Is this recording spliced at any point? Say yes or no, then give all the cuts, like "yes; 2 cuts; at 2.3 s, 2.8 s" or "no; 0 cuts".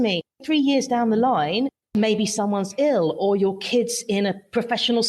yes; 1 cut; at 1.8 s